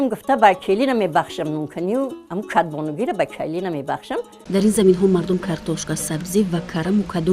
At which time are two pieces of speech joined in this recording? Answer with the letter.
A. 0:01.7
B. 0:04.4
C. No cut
B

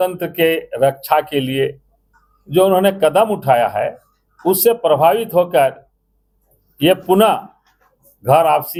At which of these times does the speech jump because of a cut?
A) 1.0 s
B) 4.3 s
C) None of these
C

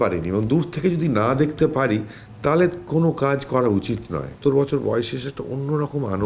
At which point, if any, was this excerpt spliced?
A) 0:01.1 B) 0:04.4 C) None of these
B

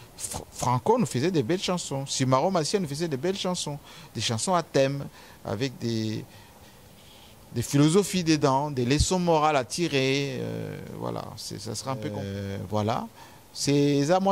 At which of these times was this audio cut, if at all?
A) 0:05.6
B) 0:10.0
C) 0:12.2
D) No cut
C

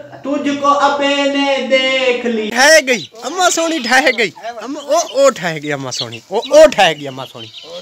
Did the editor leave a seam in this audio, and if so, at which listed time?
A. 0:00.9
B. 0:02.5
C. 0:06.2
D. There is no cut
B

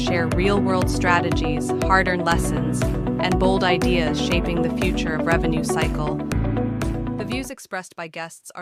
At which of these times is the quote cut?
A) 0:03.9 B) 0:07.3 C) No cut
B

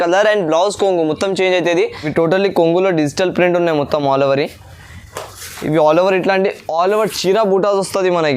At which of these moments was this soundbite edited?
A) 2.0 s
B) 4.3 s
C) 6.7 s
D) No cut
A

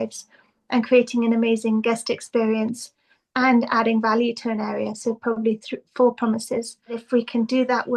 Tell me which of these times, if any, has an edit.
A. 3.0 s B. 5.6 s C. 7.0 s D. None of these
C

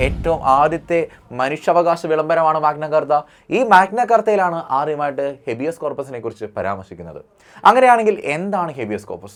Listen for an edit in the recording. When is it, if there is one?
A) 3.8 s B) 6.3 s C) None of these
C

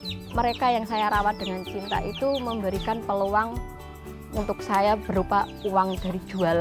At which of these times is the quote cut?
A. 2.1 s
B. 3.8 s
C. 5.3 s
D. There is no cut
D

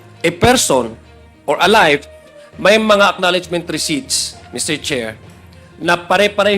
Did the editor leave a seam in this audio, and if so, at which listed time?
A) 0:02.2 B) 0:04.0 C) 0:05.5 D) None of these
A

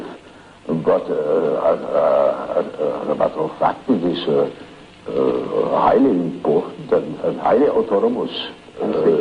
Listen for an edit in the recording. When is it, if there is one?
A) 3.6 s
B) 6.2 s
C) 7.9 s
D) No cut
A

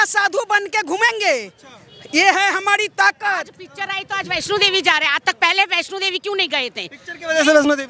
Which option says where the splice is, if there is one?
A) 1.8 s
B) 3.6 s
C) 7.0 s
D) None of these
D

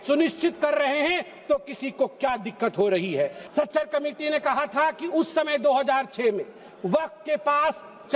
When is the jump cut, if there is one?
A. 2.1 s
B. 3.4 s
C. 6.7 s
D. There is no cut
B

